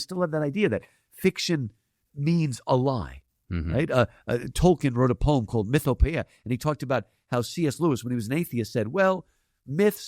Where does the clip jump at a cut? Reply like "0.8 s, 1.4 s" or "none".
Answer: none